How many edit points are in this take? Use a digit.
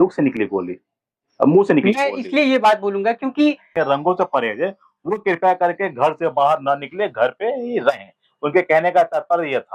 1